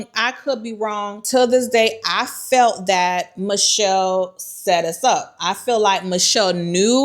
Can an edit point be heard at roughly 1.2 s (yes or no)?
yes